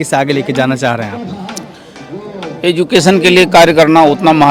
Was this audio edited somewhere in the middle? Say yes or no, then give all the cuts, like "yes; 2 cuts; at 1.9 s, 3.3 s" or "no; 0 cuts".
no; 0 cuts